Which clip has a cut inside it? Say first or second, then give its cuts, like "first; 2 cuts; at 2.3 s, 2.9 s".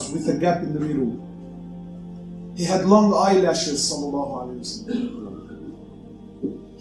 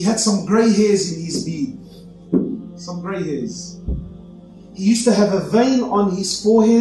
first; 1 cut; at 5.9 s